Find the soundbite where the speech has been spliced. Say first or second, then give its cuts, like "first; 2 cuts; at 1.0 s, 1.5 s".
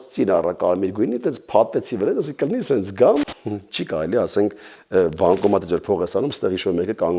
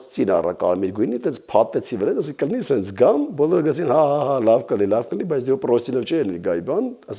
first; 1 cut; at 3.3 s